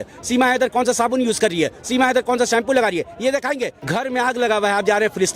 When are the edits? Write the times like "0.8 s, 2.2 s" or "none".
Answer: 3.8 s

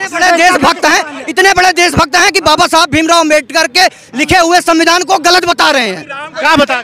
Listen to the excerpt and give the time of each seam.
none

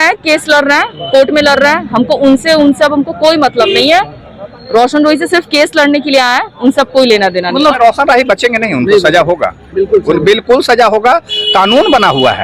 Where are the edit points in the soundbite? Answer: 7.8 s

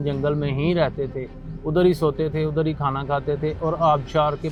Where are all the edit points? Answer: none

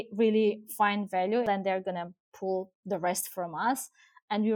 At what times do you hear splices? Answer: 1.5 s

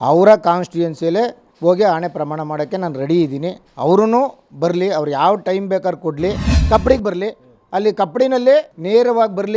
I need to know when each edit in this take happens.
1.4 s, 3.6 s, 6.5 s

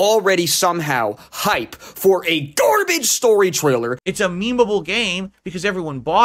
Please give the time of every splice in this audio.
4.0 s

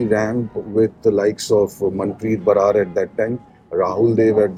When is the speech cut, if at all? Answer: none

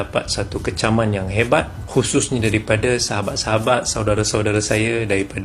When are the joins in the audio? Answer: none

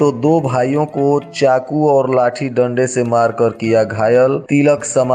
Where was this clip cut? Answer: none

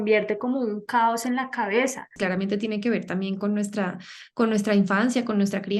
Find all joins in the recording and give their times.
2.2 s

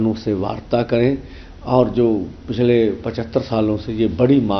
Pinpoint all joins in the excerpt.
none

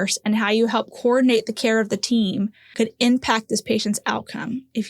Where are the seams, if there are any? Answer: 2.6 s

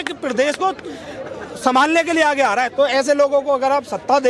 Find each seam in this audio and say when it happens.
2.7 s

